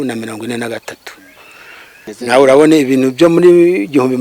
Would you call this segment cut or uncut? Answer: cut